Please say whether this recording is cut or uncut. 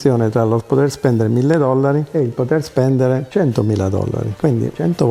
uncut